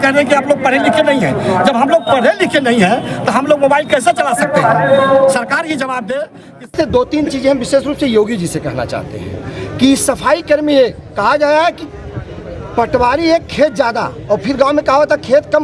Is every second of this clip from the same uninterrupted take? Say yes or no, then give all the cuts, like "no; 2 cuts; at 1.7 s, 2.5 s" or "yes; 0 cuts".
no; 1 cut; at 6.7 s